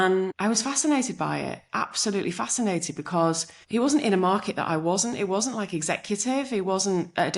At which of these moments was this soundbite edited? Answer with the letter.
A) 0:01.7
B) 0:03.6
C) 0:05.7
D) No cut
B